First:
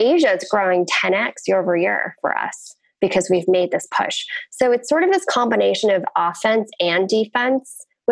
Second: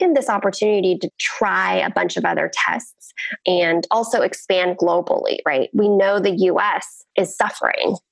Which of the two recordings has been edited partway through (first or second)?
second